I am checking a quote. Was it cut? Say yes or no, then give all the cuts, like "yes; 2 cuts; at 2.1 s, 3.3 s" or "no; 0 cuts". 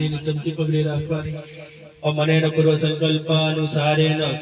no; 0 cuts